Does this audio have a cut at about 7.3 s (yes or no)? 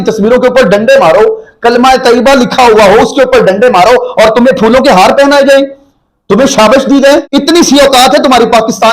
yes